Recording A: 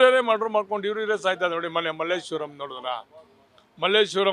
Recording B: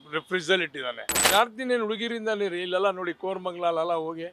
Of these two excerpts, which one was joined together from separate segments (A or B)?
B